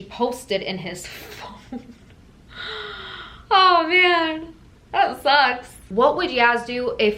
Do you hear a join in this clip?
yes; 1 cut; at 5.9 s

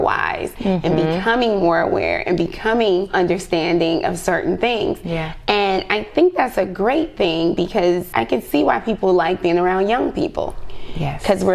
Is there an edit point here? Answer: yes; 2 cuts; at 3.1 s, 8.1 s

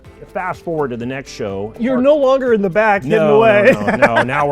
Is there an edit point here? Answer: yes; 1 cut; at 1.8 s

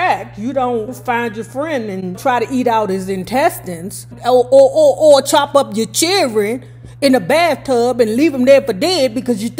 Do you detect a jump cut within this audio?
yes; 2 cuts; at 1.0 s, 2.2 s

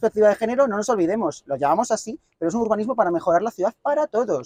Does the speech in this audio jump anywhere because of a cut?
no; 0 cuts

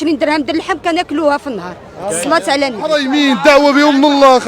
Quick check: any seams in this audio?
yes; 1 cut; at 3.0 s

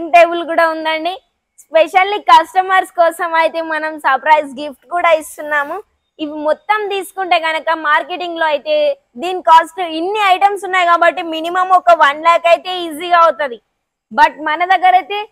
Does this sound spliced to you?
no; 0 cuts

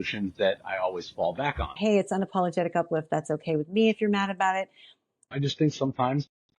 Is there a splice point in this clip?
yes; 2 cuts; at 1.7 s, 5.3 s

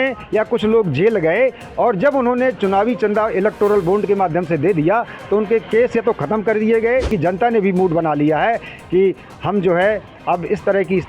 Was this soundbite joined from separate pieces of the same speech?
yes; 1 cut; at 7.1 s

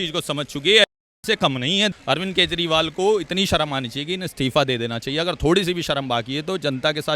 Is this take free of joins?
no; 1 cut; at 1.9 s

